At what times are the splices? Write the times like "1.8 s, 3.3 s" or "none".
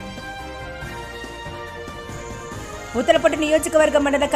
none